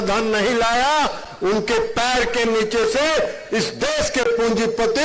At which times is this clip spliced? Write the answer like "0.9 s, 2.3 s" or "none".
none